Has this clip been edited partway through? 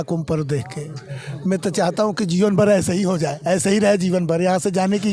no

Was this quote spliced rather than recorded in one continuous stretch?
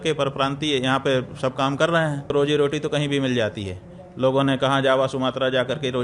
yes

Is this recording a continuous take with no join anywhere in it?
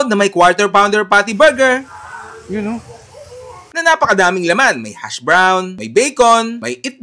yes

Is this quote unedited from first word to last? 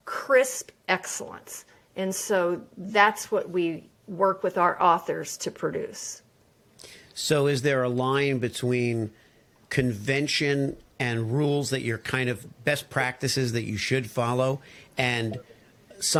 yes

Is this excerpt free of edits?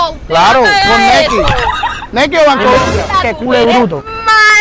yes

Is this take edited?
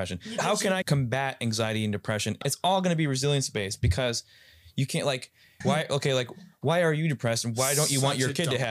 yes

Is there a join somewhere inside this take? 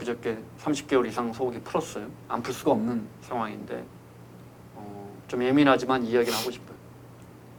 no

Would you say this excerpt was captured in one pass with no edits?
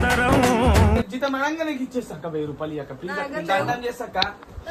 yes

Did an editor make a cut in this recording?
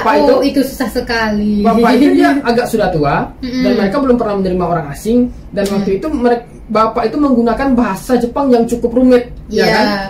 no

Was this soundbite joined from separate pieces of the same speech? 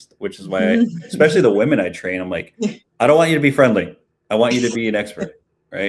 no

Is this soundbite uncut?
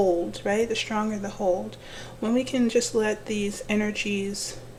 yes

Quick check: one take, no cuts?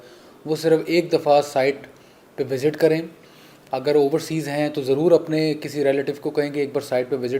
yes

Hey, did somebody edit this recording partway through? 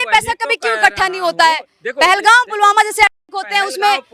no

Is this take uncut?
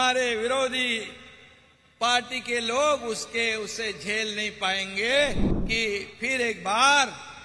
no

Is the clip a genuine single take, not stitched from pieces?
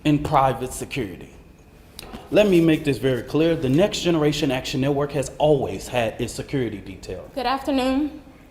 no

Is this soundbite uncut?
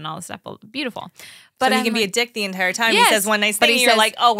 yes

